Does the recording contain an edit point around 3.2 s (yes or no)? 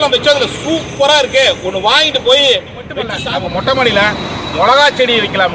yes